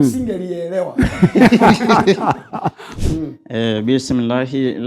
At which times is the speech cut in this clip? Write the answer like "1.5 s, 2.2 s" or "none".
2.9 s